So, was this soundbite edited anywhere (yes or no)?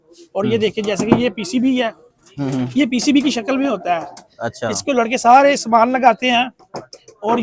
no